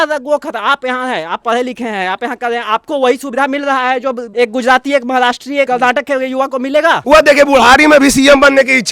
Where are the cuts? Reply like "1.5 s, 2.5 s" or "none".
4.2 s, 5.7 s, 7.0 s